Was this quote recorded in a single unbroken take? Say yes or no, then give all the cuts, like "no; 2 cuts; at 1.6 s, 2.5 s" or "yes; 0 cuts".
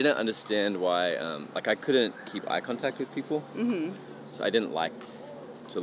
yes; 0 cuts